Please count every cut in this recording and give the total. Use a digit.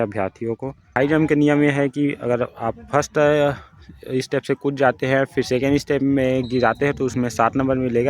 1